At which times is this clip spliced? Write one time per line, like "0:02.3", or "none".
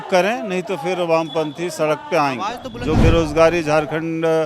0:02.6

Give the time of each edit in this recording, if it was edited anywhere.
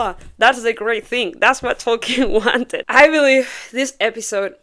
0:02.8

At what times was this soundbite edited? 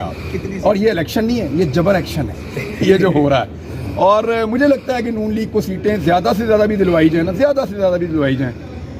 none

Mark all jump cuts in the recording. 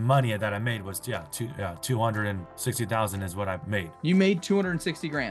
0:03.6

